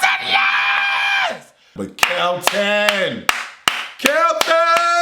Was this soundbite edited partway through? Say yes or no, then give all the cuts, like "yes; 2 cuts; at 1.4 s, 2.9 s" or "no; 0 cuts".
yes; 1 cut; at 1.8 s